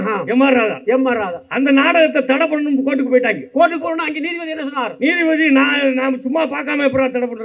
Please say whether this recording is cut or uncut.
uncut